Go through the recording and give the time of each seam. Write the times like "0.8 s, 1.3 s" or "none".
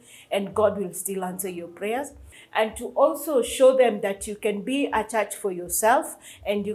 2.3 s